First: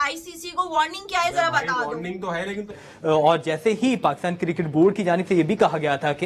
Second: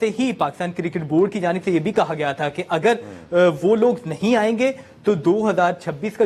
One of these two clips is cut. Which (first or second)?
first